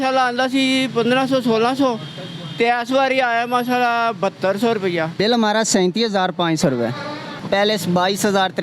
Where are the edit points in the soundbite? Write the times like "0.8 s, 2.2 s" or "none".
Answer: 5.1 s, 7.3 s